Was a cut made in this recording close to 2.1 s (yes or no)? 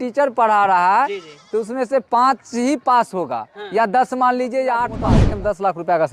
no